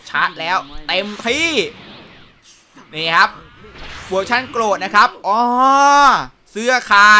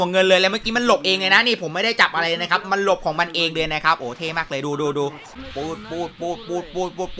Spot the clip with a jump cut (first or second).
second